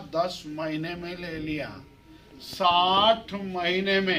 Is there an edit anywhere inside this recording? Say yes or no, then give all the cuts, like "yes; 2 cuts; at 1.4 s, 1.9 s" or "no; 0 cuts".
no; 0 cuts